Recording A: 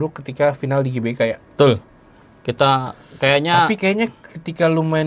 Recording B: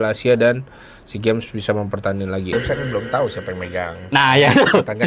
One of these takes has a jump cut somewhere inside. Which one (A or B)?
B